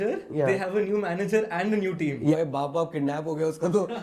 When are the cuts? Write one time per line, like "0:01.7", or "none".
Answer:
0:02.3

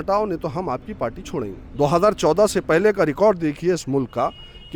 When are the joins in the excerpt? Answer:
0:01.6

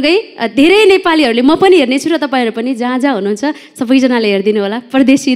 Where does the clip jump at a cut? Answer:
none

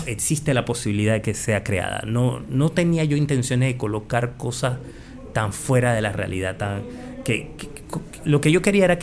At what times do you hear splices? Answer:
none

